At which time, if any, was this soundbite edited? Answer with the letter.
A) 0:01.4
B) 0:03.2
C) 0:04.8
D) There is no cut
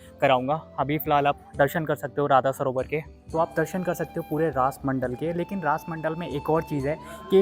B